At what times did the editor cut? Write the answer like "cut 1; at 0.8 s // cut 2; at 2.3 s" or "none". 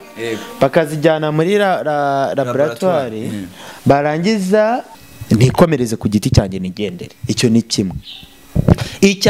cut 1; at 5.0 s